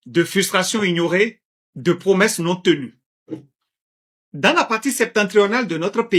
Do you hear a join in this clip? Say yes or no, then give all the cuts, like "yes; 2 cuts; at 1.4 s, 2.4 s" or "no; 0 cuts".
no; 0 cuts